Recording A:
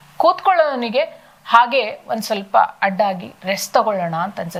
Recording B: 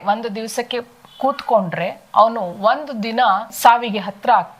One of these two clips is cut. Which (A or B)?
B